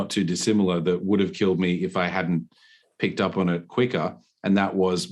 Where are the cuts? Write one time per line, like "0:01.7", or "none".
none

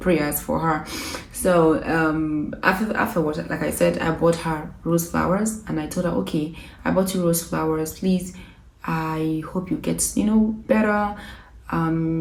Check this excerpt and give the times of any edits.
none

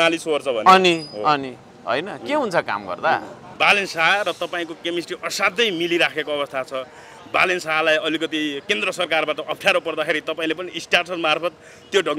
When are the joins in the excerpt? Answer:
0:03.4

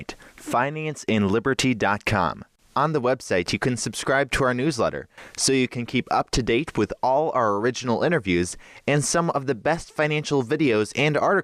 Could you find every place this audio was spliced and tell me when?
0:02.4

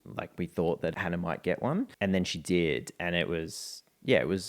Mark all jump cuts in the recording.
0:00.9
0:01.9

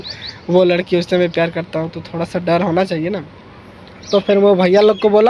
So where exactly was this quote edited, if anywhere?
none

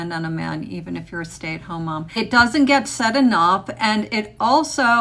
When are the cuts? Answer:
none

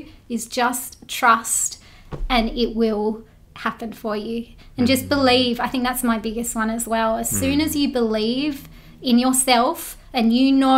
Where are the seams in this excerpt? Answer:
none

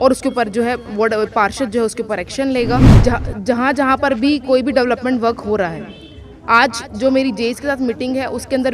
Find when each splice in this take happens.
0:03.0

